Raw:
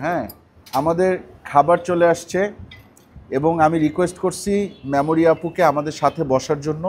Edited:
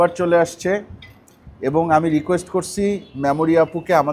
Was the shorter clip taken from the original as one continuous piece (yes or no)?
yes